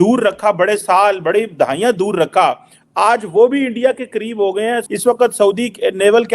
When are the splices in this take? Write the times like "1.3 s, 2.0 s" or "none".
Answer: 4.8 s

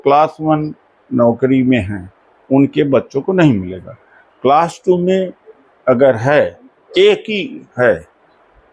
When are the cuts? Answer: none

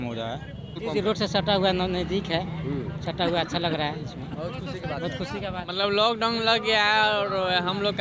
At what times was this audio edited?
0.9 s, 5.7 s

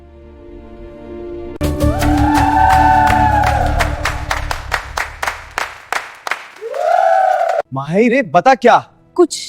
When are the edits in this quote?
1.6 s, 7.8 s

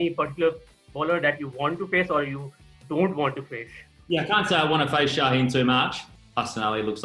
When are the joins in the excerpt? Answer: 3.9 s, 6.0 s

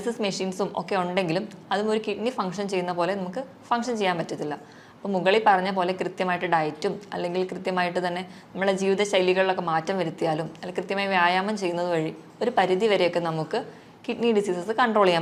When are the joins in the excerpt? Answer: none

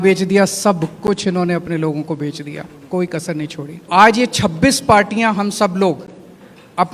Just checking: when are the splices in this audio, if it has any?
3.9 s

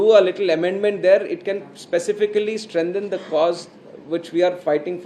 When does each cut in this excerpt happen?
none

